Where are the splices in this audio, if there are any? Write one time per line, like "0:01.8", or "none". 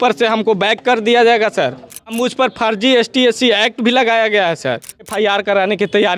0:02.1
0:05.1